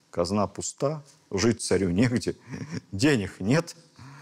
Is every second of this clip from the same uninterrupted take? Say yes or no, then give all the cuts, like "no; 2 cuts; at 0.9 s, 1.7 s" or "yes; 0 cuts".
yes; 0 cuts